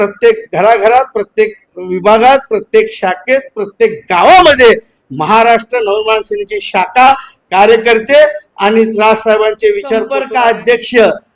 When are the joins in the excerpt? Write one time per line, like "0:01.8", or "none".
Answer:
0:10.2